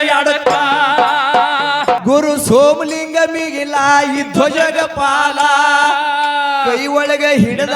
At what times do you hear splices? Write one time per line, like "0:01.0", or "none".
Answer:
0:02.0